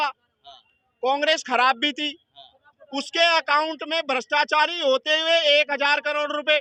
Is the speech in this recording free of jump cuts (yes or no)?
yes